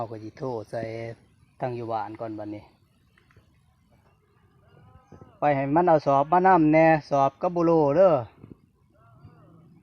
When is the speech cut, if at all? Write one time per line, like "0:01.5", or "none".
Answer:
0:04.2